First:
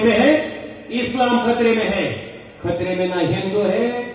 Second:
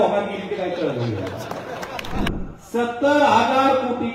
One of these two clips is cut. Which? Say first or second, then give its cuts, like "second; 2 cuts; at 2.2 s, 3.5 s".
second; 1 cut; at 2.3 s